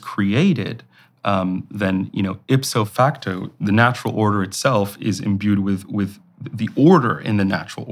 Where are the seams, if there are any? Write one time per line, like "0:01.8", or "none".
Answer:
0:02.9